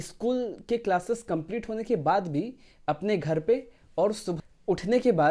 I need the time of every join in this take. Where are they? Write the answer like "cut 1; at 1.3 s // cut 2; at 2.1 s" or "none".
cut 1; at 4.4 s